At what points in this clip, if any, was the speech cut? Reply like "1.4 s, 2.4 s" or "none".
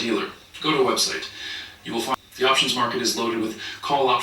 2.2 s